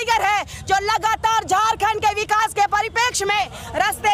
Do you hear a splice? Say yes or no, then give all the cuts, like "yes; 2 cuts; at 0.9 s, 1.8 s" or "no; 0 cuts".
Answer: no; 0 cuts